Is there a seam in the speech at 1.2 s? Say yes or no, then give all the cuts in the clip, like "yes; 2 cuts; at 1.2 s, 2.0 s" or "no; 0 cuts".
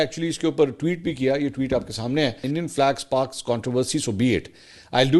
no; 1 cut; at 2.4 s